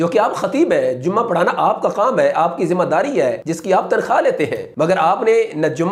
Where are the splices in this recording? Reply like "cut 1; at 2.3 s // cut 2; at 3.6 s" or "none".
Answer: none